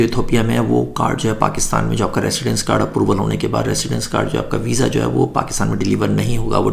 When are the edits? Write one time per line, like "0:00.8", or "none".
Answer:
none